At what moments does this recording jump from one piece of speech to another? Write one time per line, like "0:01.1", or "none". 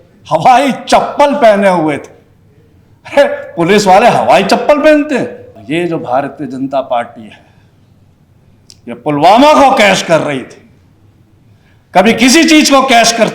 0:05.6